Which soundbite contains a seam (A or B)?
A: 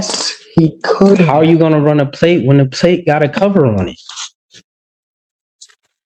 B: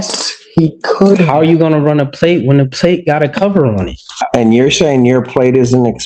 B